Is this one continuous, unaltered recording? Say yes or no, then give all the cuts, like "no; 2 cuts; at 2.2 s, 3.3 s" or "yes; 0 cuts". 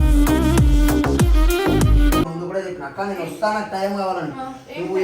no; 1 cut; at 2.2 s